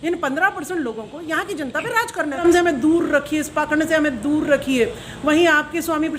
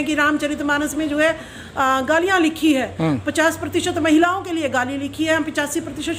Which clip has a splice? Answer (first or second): first